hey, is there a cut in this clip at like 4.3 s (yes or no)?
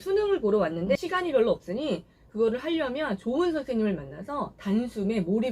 no